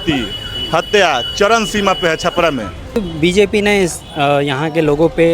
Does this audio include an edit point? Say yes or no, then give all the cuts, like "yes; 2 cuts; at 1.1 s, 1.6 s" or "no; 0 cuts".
yes; 1 cut; at 3.0 s